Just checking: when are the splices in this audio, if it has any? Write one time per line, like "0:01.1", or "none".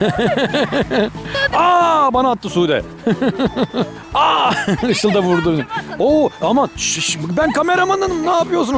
0:01.4
0:04.0